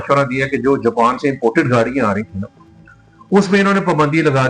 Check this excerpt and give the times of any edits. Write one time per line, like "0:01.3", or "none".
none